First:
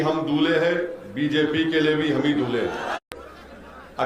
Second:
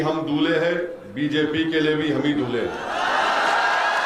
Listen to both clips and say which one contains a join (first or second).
first